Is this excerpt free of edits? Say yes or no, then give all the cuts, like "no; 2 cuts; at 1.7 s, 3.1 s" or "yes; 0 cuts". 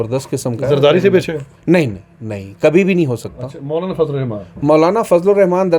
yes; 0 cuts